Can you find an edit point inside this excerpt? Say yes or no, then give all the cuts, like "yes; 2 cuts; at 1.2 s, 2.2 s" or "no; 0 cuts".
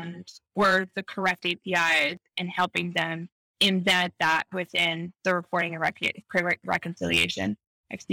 no; 0 cuts